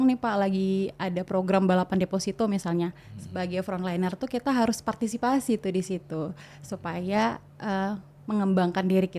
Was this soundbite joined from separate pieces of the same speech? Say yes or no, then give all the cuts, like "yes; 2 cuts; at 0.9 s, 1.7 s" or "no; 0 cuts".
no; 0 cuts